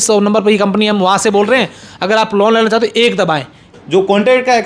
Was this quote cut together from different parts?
yes; 1 cut; at 3.7 s

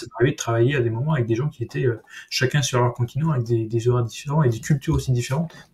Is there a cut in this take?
no; 0 cuts

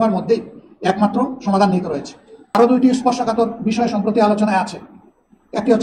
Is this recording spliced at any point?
yes; 1 cut; at 2.6 s

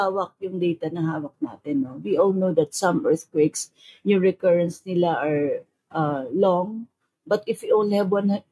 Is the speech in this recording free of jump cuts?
yes; 0 cuts

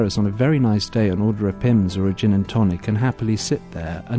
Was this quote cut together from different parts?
no; 0 cuts

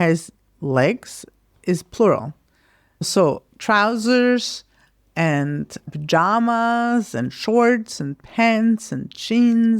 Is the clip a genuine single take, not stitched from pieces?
no; 1 cut; at 2.9 s

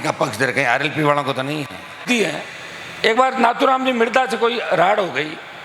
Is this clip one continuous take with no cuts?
no; 1 cut; at 2.0 s

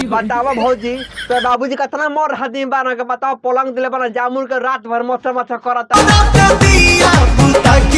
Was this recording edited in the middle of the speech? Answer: yes; 1 cut; at 5.4 s

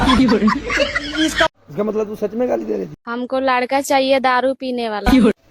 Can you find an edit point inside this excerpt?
yes; 1 cut; at 3.0 s

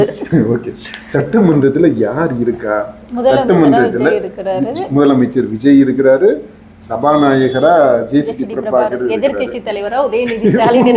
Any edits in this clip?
no; 0 cuts

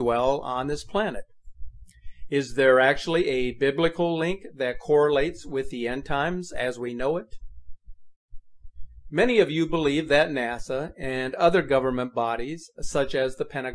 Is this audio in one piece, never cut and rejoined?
no; 1 cut; at 11.5 s

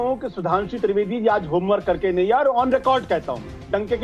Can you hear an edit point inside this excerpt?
no; 0 cuts

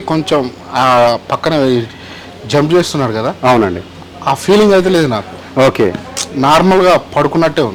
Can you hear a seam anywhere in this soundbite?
no; 0 cuts

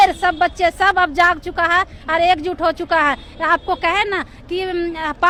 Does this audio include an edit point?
no; 0 cuts

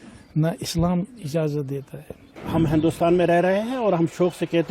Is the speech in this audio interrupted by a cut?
yes; 1 cut; at 2.4 s

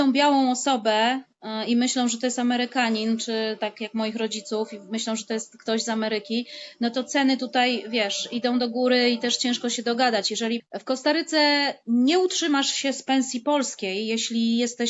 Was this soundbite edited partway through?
yes; 1 cut; at 10.7 s

